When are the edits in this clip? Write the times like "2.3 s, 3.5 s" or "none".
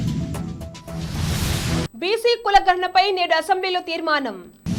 none